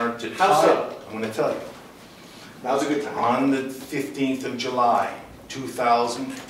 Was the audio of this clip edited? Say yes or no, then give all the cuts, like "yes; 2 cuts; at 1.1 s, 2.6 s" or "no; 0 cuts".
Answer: no; 0 cuts